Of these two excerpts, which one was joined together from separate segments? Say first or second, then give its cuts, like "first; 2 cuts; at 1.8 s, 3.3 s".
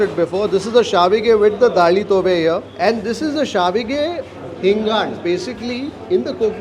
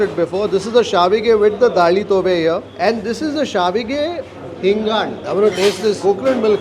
second; 1 cut; at 5.2 s